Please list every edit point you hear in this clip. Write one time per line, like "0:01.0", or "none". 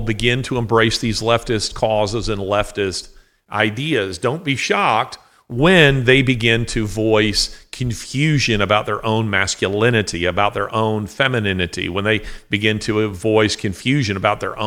none

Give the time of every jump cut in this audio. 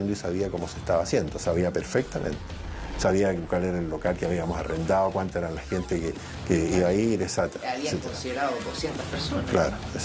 none

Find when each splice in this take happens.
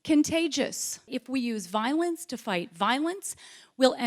0:01.1

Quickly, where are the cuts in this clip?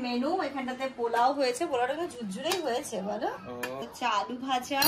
0:03.9

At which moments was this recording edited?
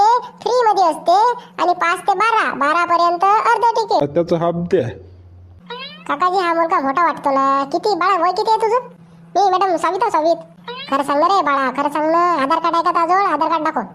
0:04.0

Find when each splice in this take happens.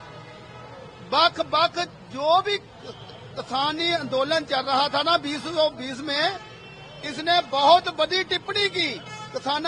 none

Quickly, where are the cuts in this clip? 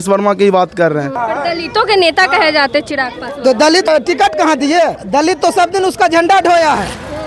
0:01.1
0:03.9
0:05.0

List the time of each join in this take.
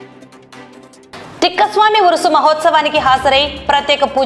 0:01.0

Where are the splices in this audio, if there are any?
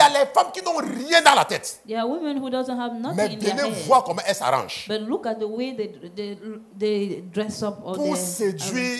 none

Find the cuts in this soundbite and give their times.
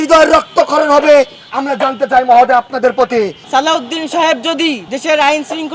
0:03.4
0:04.9

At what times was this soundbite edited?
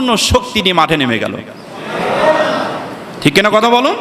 none

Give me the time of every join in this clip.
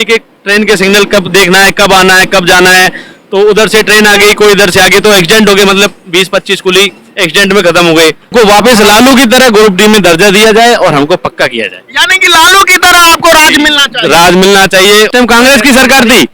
0:08.3
0:15.1

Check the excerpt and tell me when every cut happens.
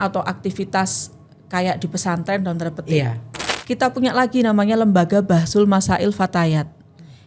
0:03.4

